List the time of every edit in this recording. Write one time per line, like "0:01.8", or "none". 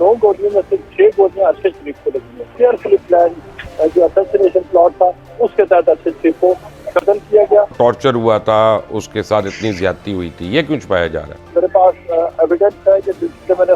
0:02.4
0:07.7
0:11.5